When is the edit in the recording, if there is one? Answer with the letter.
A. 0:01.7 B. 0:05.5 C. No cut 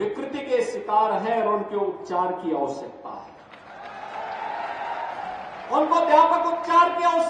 C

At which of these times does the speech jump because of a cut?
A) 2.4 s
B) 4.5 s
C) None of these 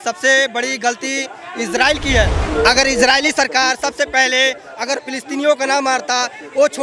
A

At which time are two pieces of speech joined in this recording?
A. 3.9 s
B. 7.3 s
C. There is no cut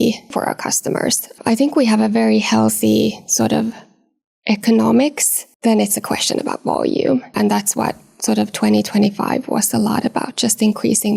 C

